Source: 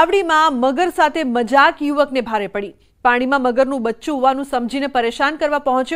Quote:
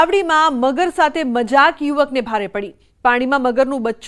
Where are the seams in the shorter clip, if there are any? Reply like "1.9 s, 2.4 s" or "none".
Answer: none

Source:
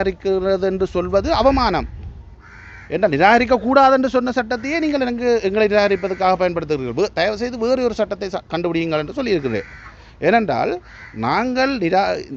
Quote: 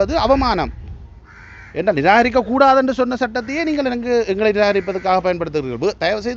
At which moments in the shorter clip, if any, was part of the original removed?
none

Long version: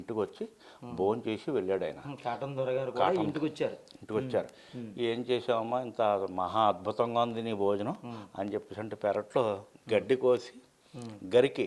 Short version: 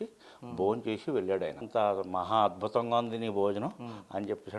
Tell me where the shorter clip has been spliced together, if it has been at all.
1.6 s

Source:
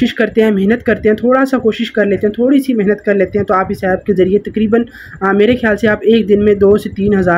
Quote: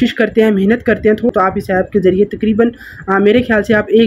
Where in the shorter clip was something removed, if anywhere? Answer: 1.3 s

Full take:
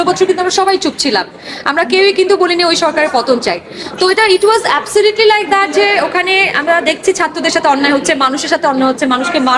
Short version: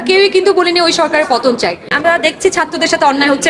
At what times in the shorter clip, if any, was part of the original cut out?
1.9 s

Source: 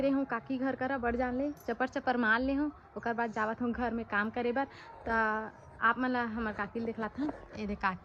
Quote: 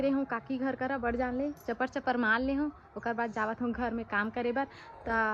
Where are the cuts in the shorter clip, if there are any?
none

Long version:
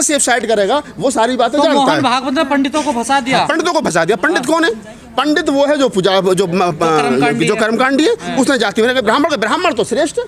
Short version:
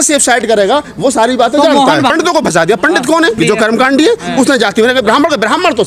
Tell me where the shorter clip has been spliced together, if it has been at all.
2.1 s, 3.4 s

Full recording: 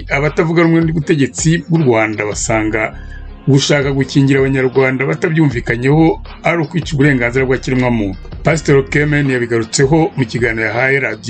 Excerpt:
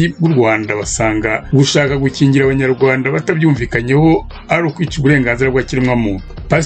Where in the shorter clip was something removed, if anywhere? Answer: 1.4 s

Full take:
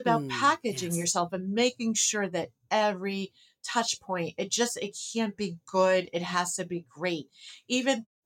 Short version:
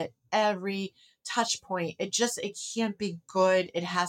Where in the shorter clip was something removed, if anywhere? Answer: none

